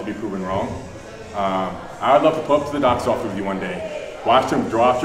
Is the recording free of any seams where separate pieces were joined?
yes; 0 cuts

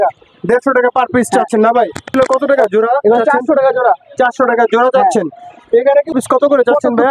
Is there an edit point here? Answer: yes; 3 cuts; at 2.1 s, 5.3 s, 6.1 s

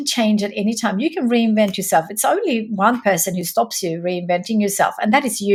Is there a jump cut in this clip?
no; 0 cuts

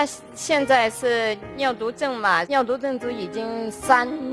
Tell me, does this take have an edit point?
no; 0 cuts

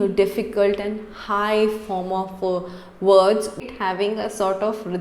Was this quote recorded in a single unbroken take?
no; 1 cut; at 3.6 s

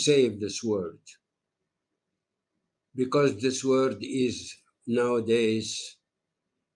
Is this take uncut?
yes; 0 cuts

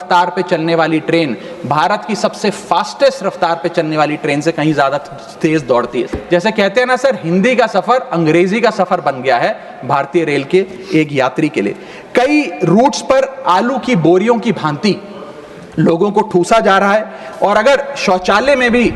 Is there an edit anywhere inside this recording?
yes; 1 cut; at 6.2 s

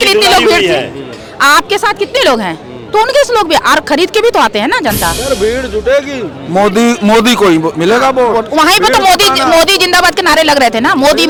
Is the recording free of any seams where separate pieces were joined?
yes; 0 cuts

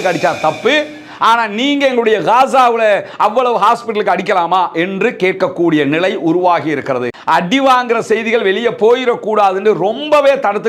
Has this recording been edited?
yes; 1 cut; at 7.1 s

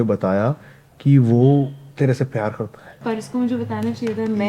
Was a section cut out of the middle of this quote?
yes; 2 cuts; at 1.8 s, 3.0 s

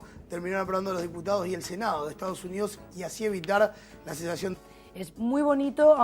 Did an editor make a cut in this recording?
no; 0 cuts

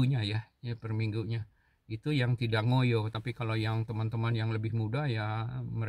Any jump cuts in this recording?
no; 0 cuts

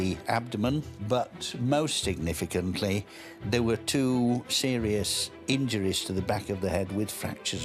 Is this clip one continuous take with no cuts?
yes; 0 cuts

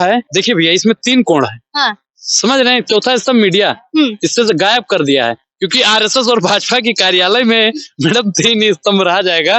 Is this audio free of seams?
yes; 0 cuts

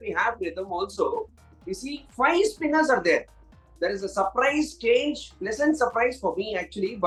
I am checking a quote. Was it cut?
no; 0 cuts

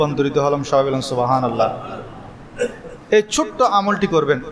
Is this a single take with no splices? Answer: yes; 0 cuts

